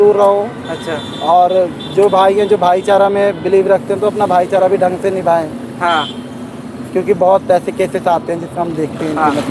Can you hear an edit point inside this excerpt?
no; 0 cuts

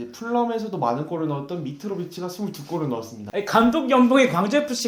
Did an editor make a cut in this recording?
yes; 1 cut; at 3.2 s

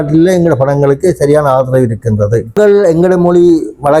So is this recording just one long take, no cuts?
no; 1 cut; at 2.6 s

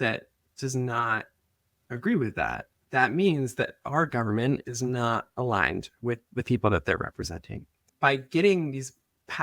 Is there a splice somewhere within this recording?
yes; 2 cuts; at 2.7 s, 7.9 s

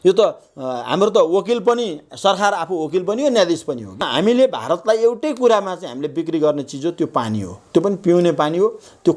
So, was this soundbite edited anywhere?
yes; 1 cut; at 4.1 s

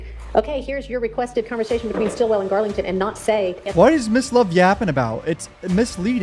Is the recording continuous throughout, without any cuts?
yes; 0 cuts

